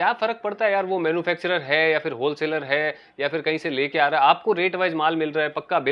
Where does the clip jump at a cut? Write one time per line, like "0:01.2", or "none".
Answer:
none